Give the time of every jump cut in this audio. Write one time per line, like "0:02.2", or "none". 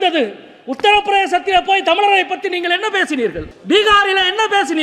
0:03.5